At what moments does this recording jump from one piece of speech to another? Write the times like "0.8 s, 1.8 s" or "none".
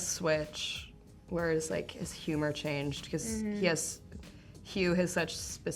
none